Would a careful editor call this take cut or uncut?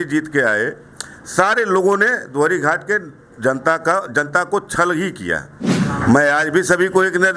cut